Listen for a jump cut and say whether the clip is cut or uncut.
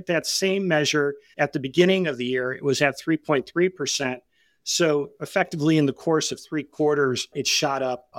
cut